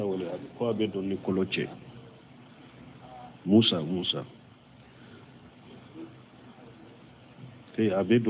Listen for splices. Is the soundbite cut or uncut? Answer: uncut